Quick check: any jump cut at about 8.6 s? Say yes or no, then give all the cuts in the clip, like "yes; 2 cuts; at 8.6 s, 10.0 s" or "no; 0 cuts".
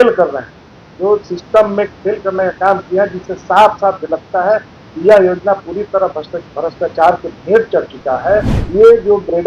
yes; 1 cut; at 8.6 s